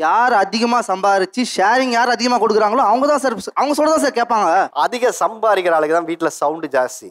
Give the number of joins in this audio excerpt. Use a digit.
1